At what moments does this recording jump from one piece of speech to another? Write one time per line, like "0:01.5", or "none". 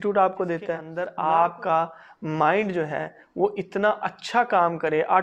0:00.9